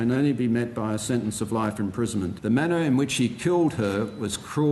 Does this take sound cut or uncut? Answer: cut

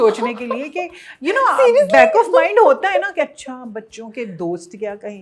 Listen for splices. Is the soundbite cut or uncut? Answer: uncut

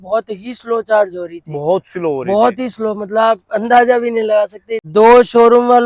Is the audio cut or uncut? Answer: cut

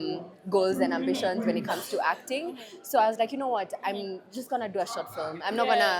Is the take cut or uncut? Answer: uncut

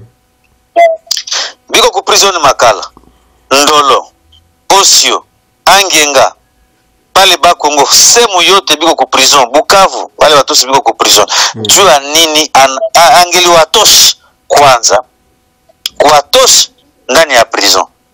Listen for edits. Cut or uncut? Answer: uncut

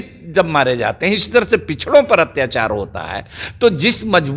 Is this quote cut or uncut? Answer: uncut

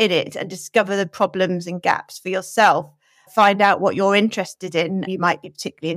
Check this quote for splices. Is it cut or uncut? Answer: cut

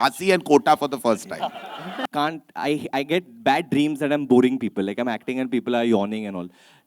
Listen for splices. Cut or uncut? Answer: cut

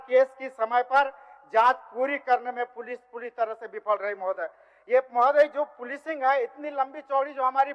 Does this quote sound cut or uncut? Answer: uncut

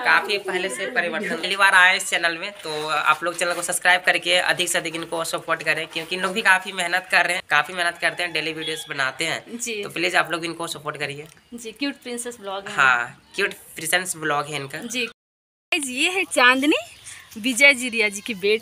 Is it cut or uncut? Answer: cut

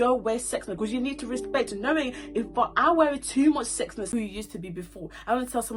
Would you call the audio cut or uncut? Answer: cut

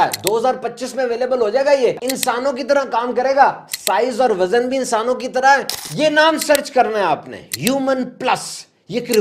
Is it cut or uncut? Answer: cut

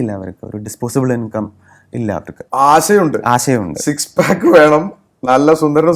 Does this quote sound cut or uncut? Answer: cut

